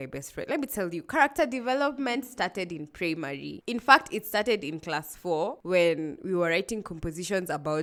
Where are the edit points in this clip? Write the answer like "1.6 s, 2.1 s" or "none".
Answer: none